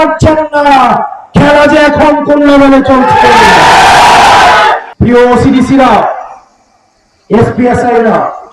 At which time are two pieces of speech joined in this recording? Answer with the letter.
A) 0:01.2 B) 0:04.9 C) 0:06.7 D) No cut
B